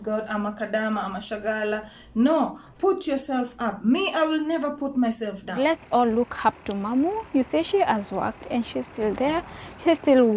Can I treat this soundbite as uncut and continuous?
no; 1 cut; at 5.8 s

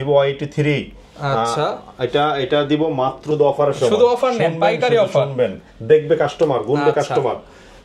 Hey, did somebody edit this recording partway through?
yes; 1 cut; at 3.2 s

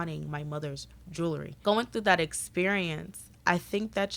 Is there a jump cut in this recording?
yes; 1 cut; at 1.5 s

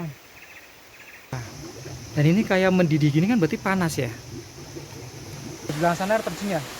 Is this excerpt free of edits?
no; 2 cuts; at 1.4 s, 5.7 s

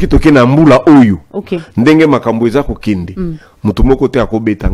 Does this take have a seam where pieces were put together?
no; 0 cuts

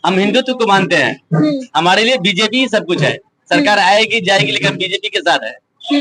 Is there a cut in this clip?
no; 0 cuts

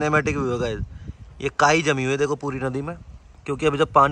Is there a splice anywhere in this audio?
no; 0 cuts

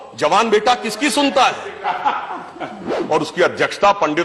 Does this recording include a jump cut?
yes; 1 cut; at 3.0 s

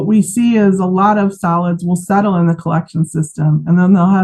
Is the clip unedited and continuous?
yes; 0 cuts

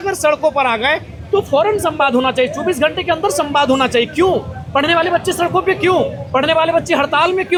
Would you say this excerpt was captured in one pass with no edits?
yes; 0 cuts

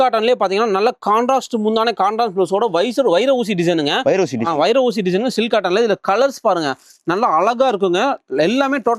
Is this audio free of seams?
yes; 0 cuts

